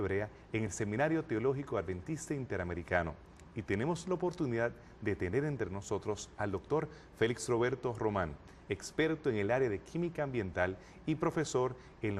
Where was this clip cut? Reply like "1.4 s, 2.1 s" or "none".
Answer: none